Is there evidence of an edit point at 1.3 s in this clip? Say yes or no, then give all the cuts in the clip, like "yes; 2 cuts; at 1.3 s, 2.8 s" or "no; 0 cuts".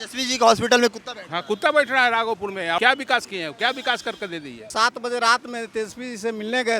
no; 2 cuts; at 2.8 s, 4.7 s